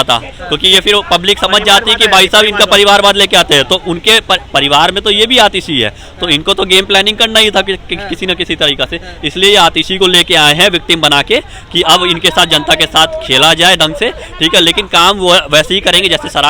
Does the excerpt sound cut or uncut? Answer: uncut